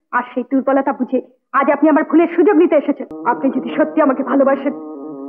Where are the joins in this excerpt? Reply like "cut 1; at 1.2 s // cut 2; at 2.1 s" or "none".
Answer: cut 1; at 3.1 s